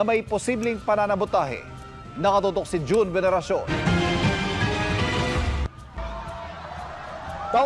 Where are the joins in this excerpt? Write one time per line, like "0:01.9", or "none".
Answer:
0:04.3